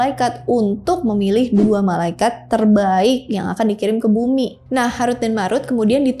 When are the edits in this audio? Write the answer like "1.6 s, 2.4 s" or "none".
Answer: 4.6 s